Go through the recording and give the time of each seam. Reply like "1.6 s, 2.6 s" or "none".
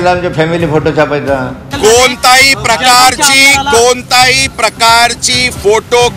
1.6 s

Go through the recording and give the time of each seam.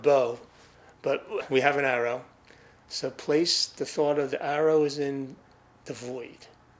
1.4 s

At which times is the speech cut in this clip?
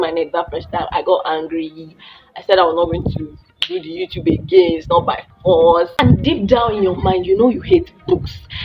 6.0 s

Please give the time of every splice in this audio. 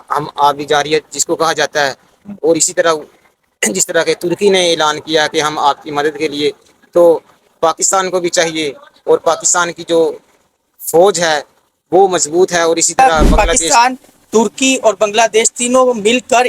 13.3 s

